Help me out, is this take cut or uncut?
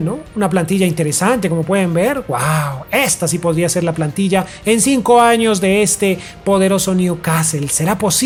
uncut